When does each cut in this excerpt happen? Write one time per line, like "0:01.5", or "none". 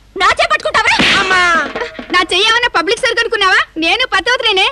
none